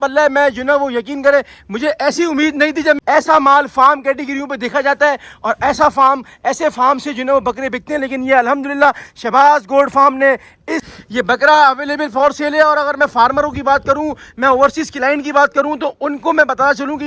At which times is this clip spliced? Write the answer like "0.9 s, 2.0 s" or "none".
3.0 s, 10.8 s